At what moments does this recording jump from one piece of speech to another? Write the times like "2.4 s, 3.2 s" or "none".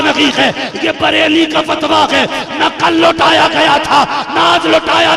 none